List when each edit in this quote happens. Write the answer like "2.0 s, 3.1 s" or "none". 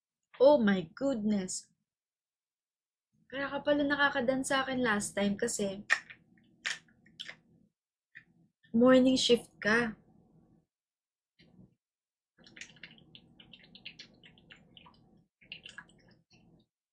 none